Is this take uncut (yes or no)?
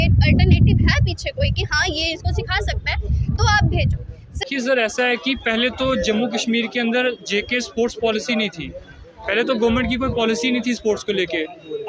no